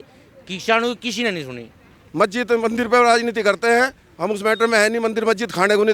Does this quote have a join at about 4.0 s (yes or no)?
no